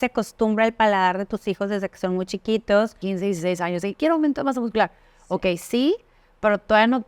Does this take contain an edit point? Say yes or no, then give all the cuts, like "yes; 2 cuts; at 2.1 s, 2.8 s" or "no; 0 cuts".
yes; 1 cut; at 3.0 s